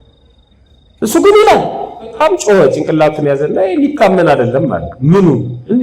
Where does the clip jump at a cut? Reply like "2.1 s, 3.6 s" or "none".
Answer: 2.2 s